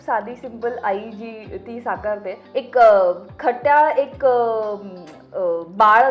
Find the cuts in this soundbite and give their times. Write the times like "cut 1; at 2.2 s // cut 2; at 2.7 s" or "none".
cut 1; at 2.4 s